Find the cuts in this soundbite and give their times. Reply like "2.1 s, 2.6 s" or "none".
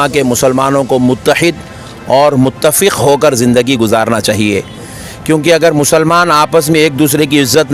none